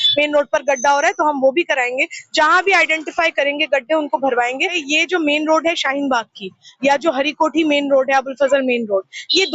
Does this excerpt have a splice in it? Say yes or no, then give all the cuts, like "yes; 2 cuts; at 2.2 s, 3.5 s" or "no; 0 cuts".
yes; 1 cut; at 4.8 s